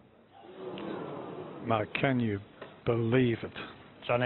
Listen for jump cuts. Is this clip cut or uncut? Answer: uncut